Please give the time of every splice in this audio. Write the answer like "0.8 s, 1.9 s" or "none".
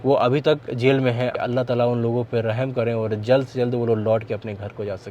1.3 s